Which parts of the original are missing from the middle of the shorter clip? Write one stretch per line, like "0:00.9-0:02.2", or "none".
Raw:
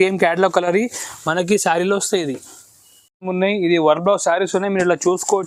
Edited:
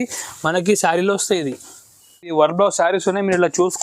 0:03.1-0:03.8